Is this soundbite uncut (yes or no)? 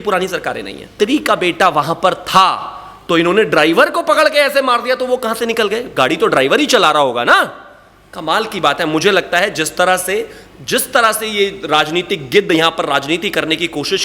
no